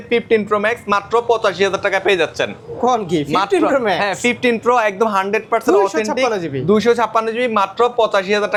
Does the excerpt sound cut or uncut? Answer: uncut